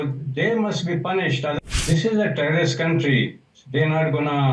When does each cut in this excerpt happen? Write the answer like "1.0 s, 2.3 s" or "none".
1.6 s